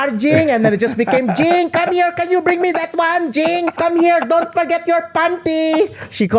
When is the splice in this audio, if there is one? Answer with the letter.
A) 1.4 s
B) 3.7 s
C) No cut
B